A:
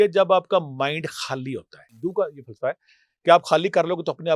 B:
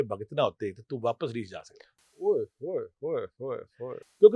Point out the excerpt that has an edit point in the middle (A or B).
A